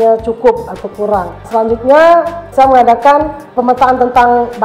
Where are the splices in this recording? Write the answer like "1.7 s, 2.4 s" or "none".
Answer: 1.4 s, 2.5 s, 3.5 s